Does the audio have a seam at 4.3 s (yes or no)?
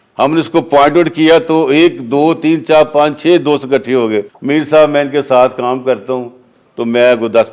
yes